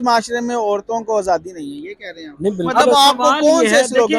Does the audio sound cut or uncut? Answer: cut